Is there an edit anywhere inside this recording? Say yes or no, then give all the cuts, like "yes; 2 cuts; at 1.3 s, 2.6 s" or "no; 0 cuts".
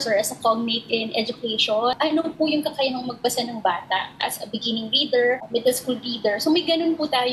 yes; 2 cuts; at 1.9 s, 5.4 s